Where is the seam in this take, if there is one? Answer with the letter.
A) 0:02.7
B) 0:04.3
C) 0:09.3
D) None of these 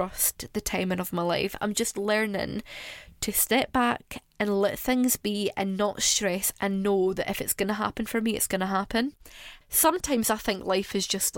C